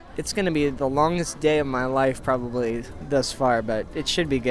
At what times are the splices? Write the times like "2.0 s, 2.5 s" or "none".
none

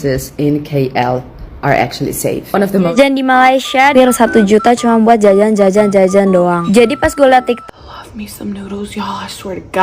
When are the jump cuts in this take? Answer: 2.9 s, 3.9 s, 7.6 s

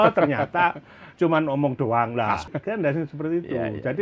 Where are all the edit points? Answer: 2.4 s

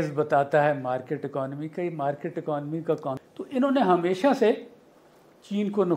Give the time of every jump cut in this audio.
3.1 s

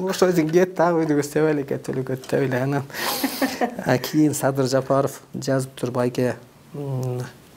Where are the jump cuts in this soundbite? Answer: none

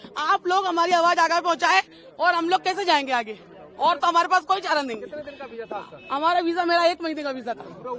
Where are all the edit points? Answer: none

